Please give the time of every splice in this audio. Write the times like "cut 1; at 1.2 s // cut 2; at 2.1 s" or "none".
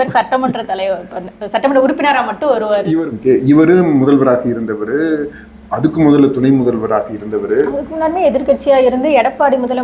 cut 1; at 2.9 s